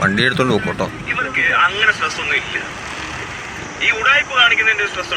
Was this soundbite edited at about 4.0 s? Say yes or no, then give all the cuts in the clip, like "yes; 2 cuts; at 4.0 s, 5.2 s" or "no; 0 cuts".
no; 1 cut; at 1.1 s